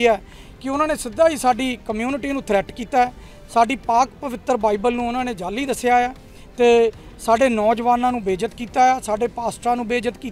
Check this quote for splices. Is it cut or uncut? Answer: uncut